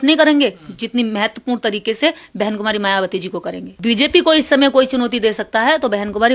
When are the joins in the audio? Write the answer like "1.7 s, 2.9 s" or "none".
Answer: 3.7 s